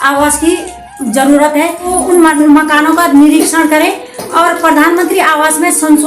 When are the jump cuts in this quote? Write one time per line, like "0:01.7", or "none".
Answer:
0:01.9